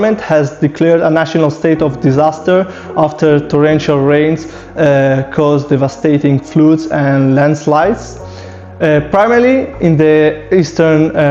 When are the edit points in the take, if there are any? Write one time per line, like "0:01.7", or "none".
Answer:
none

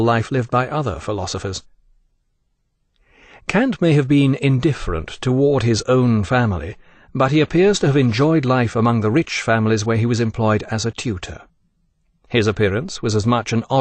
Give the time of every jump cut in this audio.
none

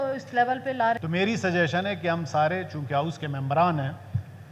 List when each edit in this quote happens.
0:01.0

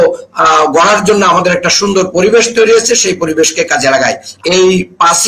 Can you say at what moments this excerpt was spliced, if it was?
0:04.3

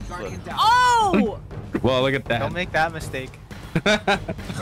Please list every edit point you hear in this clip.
none

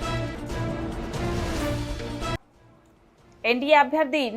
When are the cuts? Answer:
0:02.5

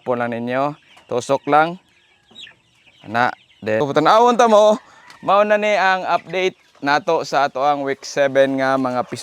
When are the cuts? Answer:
0:03.8

